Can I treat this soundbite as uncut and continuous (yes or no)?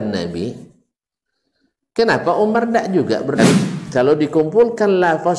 no